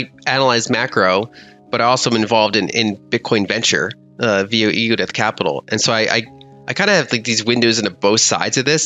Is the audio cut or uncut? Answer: uncut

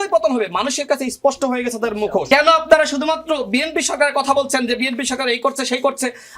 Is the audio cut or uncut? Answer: cut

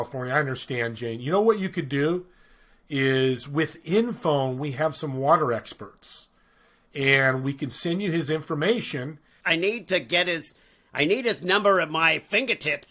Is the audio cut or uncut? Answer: cut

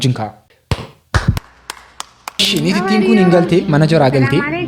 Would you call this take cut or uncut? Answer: cut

